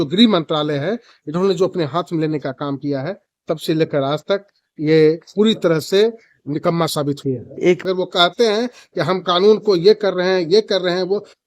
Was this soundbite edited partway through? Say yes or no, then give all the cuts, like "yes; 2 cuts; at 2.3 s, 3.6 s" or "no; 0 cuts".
yes; 1 cut; at 7.8 s